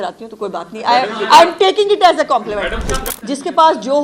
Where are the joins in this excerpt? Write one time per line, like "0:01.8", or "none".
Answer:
0:03.1